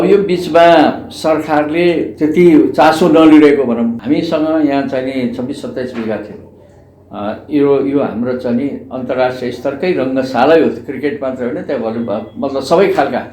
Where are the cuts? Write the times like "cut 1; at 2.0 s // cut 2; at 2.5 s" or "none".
cut 1; at 4.0 s